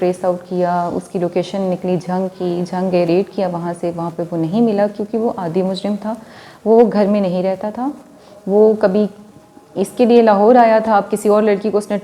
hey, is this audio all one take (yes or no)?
yes